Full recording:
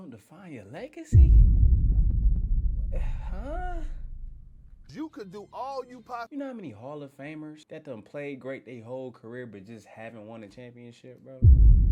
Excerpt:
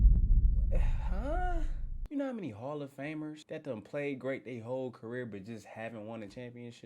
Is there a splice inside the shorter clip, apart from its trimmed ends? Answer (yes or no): yes